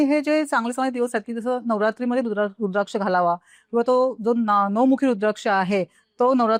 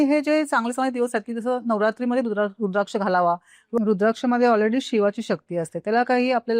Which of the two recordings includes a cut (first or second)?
second